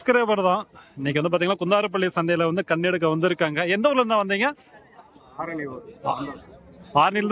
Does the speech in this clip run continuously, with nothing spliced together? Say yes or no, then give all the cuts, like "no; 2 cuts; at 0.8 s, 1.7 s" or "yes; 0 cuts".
yes; 0 cuts